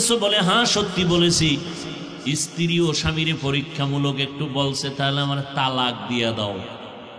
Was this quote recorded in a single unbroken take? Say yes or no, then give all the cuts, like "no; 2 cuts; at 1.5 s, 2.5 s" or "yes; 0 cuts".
yes; 0 cuts